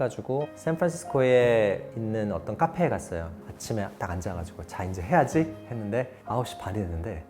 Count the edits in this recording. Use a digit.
0